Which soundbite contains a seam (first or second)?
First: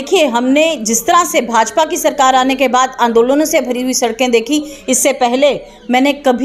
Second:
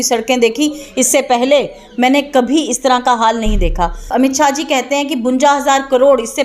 second